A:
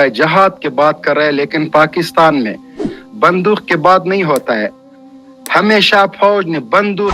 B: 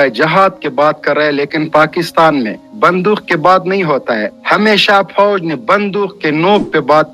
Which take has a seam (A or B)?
B